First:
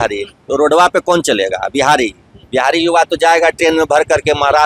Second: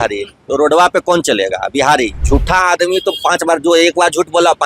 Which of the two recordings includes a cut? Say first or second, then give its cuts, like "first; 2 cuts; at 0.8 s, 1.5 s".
second; 1 cut; at 2.2 s